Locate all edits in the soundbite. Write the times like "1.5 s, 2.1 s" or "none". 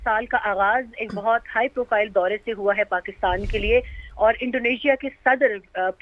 none